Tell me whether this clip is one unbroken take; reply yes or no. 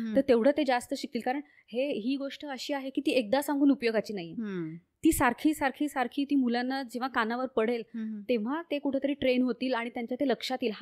yes